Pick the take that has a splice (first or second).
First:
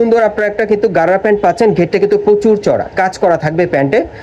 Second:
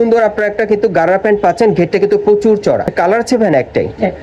second